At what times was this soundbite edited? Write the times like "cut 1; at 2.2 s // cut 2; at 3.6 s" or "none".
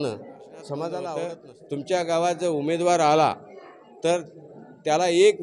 cut 1; at 1.3 s